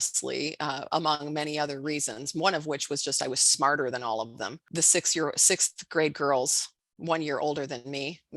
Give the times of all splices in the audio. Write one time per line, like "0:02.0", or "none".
0:04.7